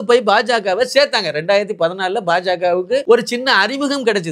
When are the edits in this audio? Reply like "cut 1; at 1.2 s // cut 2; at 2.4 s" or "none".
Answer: cut 1; at 3.0 s